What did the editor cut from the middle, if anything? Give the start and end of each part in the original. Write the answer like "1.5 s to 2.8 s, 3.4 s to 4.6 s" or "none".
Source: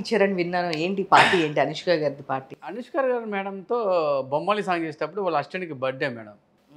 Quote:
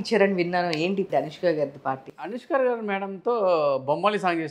1.1 s to 1.5 s